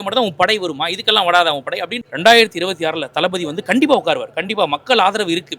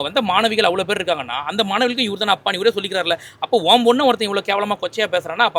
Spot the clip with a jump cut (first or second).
first